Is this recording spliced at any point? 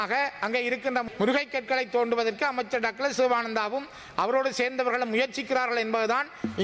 no; 0 cuts

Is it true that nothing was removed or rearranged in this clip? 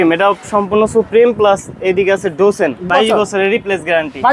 no; 1 cut; at 2.8 s

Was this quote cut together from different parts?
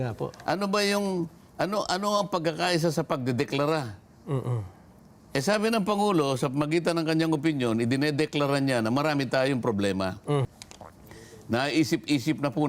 yes; 1 cut; at 10.4 s

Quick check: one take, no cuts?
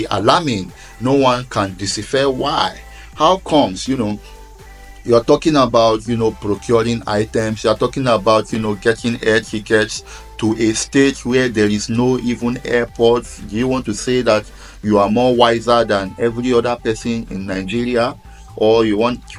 yes; 0 cuts

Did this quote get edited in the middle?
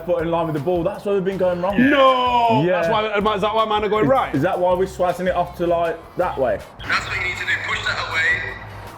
yes; 1 cut; at 6.8 s

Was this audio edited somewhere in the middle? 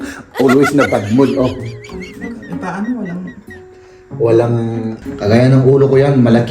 yes; 1 cut; at 5.0 s

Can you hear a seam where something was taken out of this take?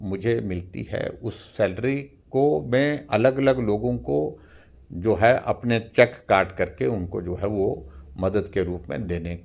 no; 0 cuts

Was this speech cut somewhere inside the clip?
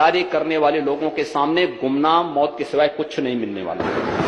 no; 0 cuts

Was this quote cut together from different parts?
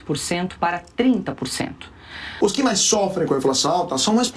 yes; 1 cut; at 2.3 s

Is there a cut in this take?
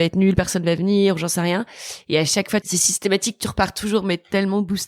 yes; 1 cut; at 2.7 s

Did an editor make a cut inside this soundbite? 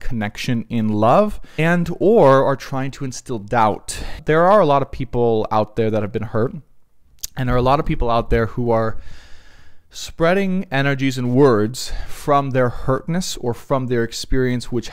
yes; 2 cuts; at 1.4 s, 4.1 s

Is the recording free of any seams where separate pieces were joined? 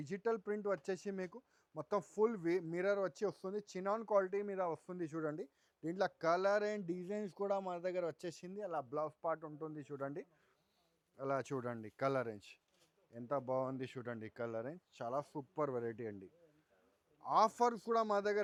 yes; 0 cuts

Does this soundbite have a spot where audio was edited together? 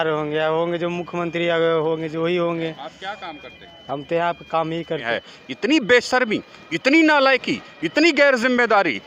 yes; 1 cut; at 5.0 s

